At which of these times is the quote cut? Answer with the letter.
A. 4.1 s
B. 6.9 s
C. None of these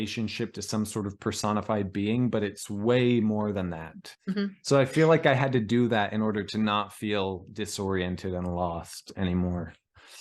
A